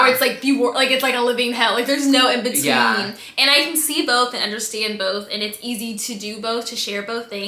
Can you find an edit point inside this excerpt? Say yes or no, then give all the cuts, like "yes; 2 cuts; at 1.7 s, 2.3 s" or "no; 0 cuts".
no; 0 cuts